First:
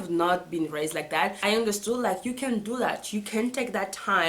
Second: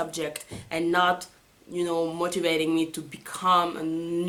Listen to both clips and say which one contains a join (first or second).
first